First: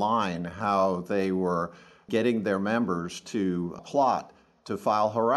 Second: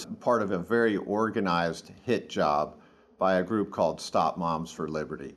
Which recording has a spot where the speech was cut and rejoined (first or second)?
first